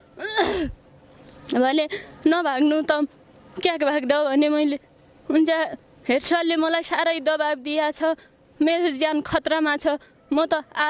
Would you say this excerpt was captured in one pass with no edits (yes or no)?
yes